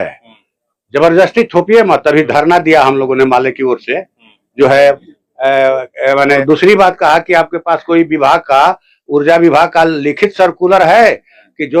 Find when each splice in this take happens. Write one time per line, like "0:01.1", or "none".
0:01.9
0:06.4